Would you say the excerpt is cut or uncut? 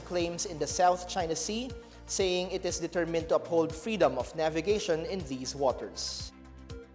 cut